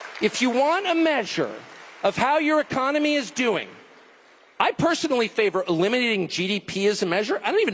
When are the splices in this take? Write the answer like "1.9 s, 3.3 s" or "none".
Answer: none